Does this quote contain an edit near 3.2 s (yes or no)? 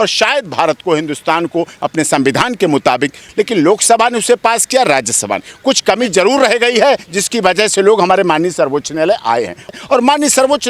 yes